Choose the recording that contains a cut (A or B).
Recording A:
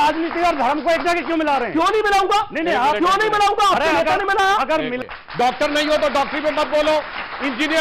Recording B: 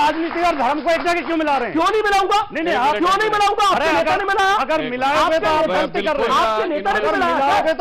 A